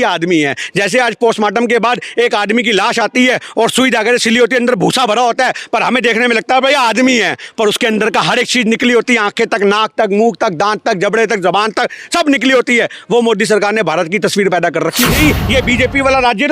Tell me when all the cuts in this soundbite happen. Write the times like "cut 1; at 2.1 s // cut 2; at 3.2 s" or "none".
cut 1; at 15.0 s